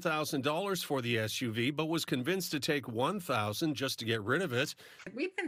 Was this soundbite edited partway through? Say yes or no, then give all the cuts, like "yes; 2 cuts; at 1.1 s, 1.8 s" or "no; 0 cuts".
no; 0 cuts